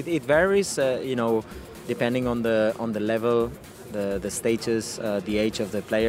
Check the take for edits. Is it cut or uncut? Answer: uncut